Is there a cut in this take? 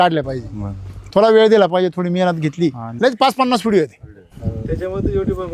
yes; 1 cut; at 2.9 s

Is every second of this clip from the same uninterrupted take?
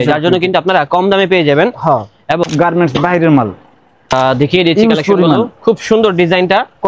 no; 2 cuts; at 2.5 s, 4.1 s

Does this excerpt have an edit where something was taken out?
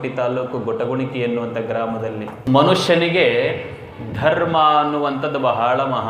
yes; 1 cut; at 2.5 s

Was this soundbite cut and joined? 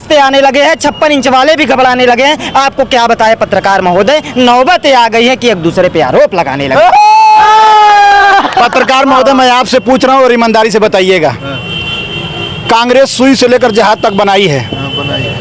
no; 0 cuts

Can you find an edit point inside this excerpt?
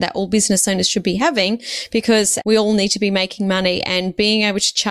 yes; 1 cut; at 2.4 s

